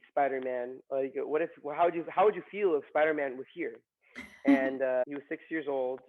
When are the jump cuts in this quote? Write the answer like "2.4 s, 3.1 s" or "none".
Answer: 5.0 s